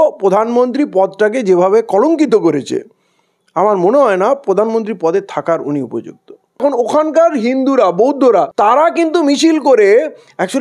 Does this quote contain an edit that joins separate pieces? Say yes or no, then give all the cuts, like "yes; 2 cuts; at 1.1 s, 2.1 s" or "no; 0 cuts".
yes; 1 cut; at 6.6 s